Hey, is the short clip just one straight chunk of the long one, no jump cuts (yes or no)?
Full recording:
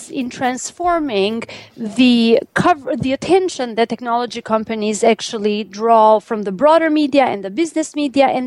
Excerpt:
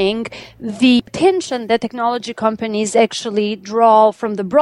no